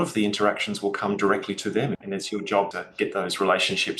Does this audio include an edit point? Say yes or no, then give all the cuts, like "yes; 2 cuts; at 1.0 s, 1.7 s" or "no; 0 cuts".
yes; 2 cuts; at 2.0 s, 2.8 s